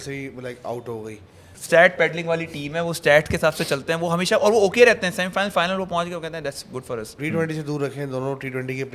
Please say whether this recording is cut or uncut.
cut